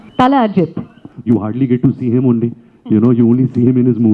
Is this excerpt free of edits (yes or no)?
no